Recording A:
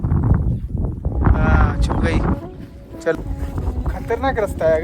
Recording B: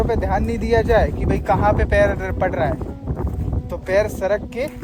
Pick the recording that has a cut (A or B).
A